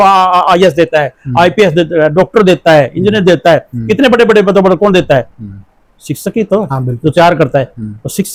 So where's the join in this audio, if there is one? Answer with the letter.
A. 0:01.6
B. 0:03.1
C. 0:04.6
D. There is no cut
D